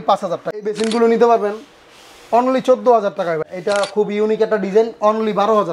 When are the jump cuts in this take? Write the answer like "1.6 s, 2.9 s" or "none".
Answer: 0.7 s, 3.5 s